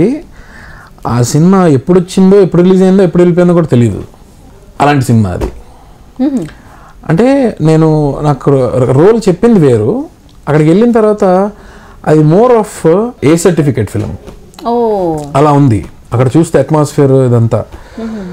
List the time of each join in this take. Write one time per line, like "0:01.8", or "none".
0:13.1